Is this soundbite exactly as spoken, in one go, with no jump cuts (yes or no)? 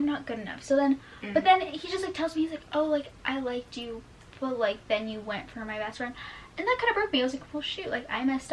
yes